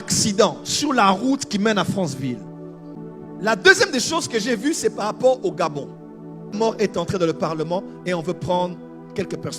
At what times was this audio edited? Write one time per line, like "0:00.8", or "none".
0:03.0
0:06.6